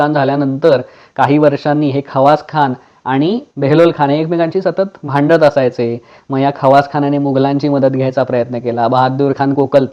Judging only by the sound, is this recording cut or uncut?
cut